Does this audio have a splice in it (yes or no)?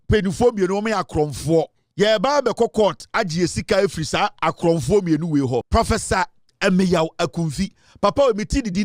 yes